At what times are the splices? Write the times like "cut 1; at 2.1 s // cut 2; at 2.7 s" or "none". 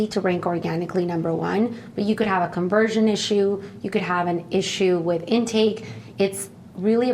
cut 1; at 5.9 s